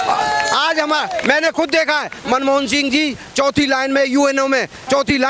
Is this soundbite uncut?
yes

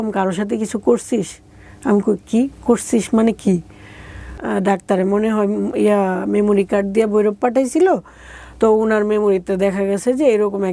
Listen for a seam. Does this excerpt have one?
yes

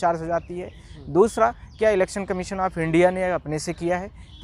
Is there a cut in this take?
no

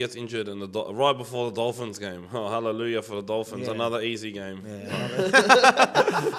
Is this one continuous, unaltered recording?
yes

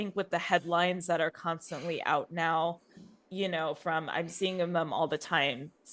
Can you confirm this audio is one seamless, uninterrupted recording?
yes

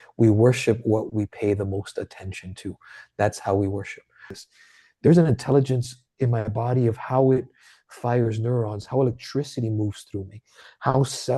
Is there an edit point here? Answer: yes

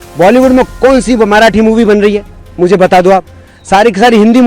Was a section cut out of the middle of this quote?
no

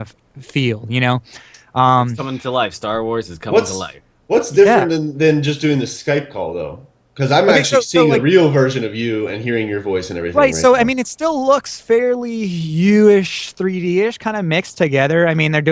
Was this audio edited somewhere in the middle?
no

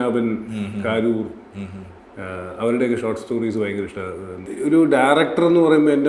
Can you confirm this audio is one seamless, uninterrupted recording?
no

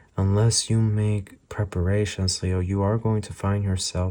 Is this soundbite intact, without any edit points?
yes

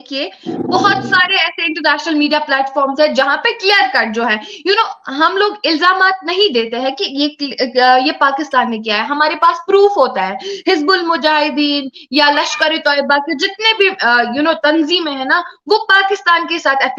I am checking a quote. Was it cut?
no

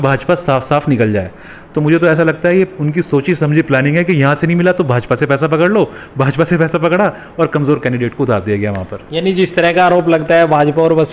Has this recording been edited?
no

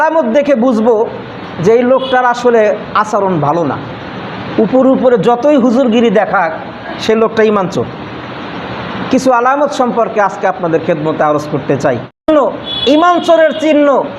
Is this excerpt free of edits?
no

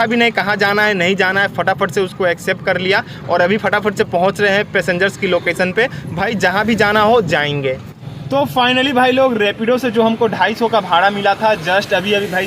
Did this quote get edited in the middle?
no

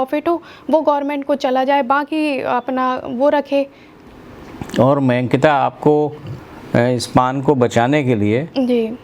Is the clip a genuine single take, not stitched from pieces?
no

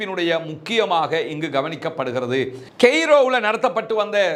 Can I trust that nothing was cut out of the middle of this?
no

